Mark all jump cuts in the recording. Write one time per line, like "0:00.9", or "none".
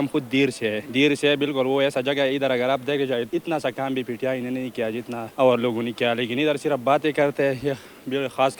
0:00.8
0:03.3
0:05.3